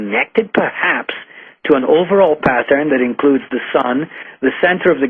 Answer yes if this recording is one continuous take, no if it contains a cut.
yes